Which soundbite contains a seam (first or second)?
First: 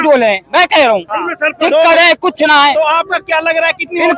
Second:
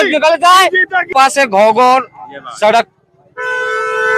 second